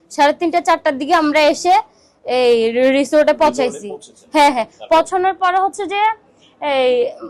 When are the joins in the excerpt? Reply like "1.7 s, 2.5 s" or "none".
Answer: none